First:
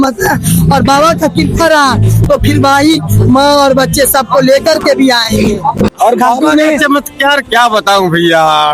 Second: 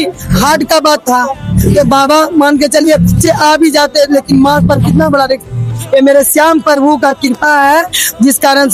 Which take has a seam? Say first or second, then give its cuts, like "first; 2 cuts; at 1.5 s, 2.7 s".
first; 1 cut; at 5.9 s